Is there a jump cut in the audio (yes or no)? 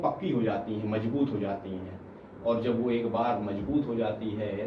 no